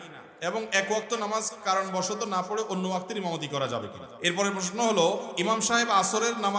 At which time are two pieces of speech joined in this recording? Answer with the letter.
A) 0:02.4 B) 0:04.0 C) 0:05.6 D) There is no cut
B